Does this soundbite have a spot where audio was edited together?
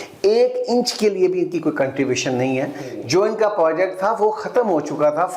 no; 0 cuts

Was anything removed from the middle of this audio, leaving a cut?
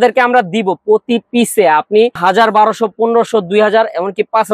yes; 1 cut; at 2.2 s

